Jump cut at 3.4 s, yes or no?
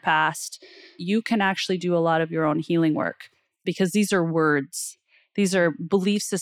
no